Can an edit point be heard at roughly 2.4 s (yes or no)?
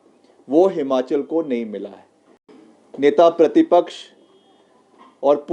yes